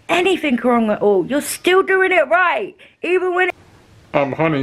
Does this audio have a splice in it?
yes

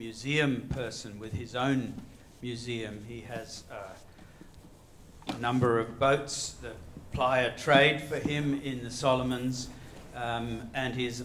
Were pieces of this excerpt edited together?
yes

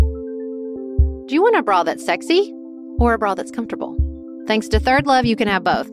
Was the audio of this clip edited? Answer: yes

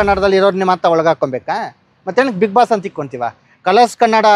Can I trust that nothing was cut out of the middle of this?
yes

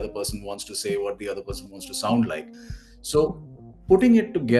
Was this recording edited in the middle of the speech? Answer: no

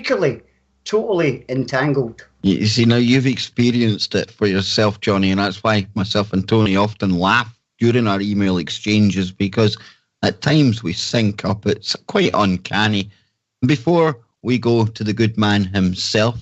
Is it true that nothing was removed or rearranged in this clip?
no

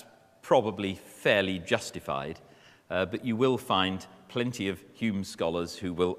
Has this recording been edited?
no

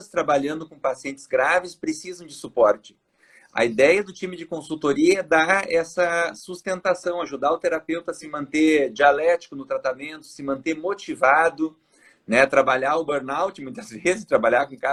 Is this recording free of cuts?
yes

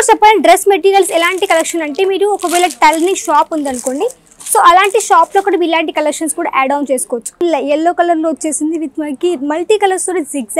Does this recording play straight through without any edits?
no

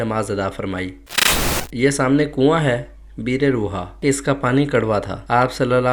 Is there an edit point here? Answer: yes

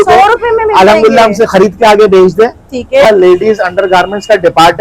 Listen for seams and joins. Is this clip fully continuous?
no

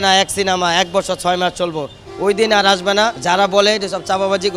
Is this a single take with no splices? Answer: no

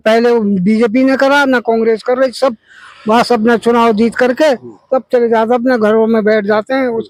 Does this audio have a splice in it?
no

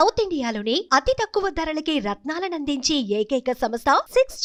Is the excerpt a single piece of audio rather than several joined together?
yes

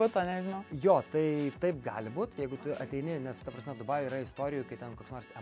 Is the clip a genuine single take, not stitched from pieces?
yes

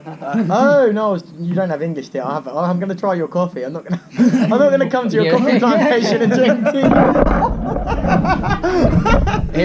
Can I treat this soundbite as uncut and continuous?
yes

